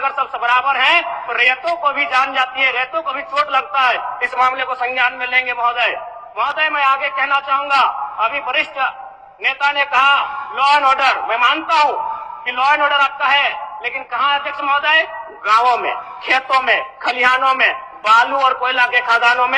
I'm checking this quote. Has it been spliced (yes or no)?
no